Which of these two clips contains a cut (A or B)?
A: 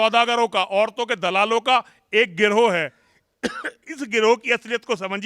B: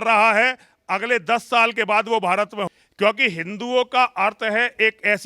B